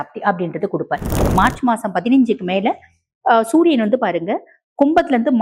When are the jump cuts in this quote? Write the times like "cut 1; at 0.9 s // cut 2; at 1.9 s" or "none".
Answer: cut 1; at 1.3 s